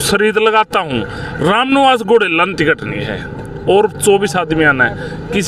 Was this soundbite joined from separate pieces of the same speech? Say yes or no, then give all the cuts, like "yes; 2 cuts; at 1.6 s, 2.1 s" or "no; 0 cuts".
no; 0 cuts